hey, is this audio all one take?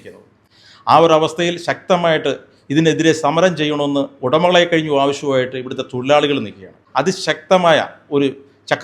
no; 1 cut; at 6.8 s

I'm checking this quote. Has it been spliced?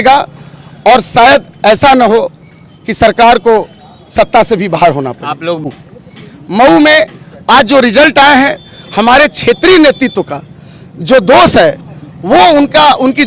yes; 1 cut; at 5.6 s

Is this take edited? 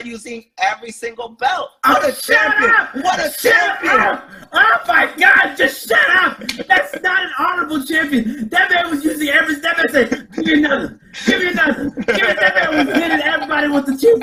no; 0 cuts

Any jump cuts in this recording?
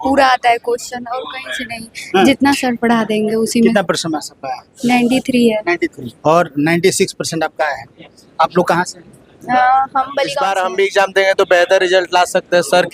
yes; 1 cut; at 10.4 s

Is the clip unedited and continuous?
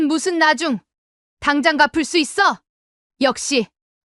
no; 1 cut; at 2.6 s

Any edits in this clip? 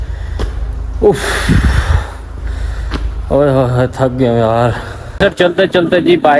no; 0 cuts

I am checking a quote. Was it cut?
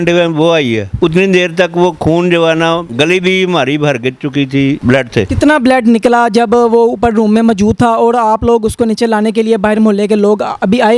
no; 0 cuts

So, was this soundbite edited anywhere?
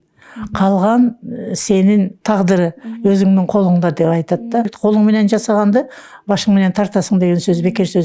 yes; 2 cuts; at 2.2 s, 4.7 s

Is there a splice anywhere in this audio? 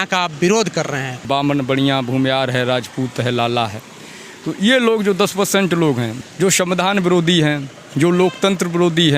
yes; 2 cuts; at 1.1 s, 6.1 s

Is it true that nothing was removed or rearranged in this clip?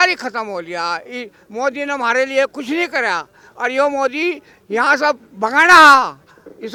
yes; 0 cuts

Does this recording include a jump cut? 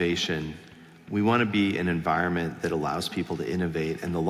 no; 0 cuts

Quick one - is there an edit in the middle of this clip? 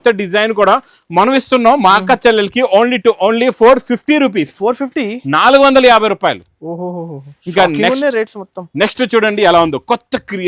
no; 0 cuts

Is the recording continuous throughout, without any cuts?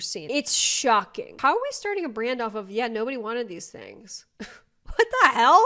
no; 1 cut; at 1.3 s

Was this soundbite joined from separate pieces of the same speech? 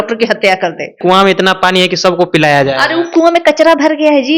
yes; 1 cut; at 1.0 s

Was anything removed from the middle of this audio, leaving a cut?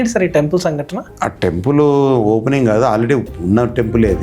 no; 0 cuts

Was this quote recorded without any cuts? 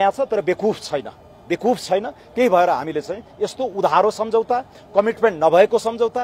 yes; 0 cuts

